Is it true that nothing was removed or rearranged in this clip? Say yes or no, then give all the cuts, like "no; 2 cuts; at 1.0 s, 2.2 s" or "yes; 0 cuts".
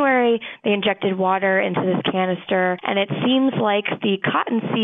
yes; 0 cuts